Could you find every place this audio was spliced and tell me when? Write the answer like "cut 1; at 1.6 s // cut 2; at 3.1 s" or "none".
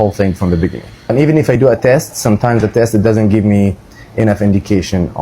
cut 1; at 1.1 s

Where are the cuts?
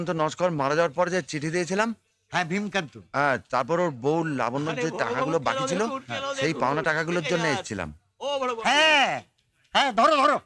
none

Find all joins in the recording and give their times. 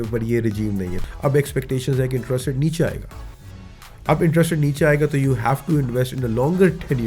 cut 1; at 1.0 s

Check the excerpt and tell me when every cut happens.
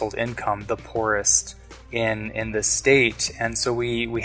none

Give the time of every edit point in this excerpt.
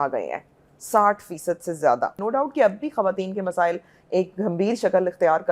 cut 1; at 2.2 s

